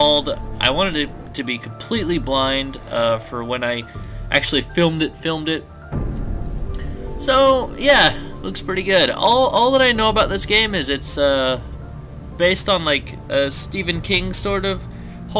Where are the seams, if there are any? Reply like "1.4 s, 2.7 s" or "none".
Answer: none